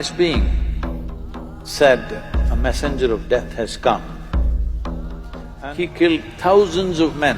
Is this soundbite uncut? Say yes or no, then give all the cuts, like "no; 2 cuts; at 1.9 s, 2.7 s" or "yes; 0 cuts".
no; 1 cut; at 5.5 s